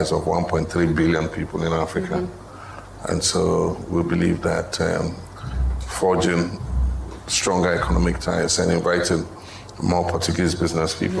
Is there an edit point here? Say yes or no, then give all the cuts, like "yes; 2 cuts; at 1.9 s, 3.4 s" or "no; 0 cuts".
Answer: no; 0 cuts